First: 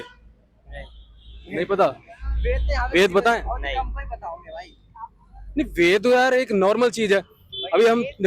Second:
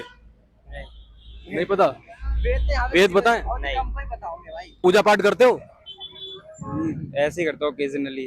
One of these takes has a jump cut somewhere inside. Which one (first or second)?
second